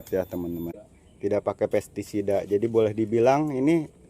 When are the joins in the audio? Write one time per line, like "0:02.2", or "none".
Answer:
0:01.2